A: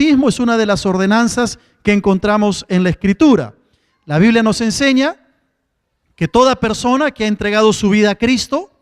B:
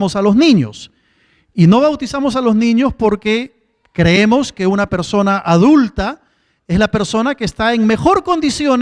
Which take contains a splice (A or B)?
A